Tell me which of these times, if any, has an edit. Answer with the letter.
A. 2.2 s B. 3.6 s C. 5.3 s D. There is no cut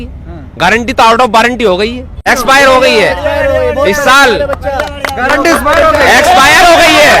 A